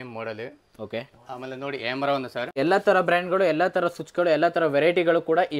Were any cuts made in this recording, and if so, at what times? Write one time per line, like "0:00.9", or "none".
0:02.5